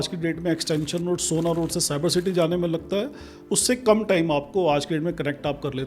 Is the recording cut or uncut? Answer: uncut